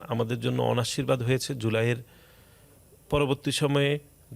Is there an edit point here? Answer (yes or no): no